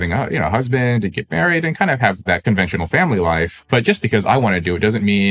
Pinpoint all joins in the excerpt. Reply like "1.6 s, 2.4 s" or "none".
2.2 s, 3.6 s